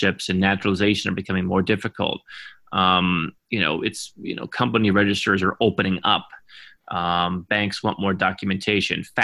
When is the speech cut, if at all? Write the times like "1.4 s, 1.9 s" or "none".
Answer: none